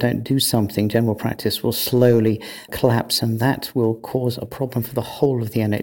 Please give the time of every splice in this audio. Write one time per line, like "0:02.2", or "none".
0:02.7